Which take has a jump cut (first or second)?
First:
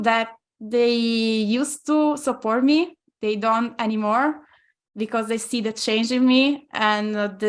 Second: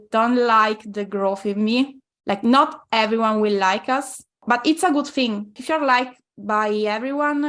second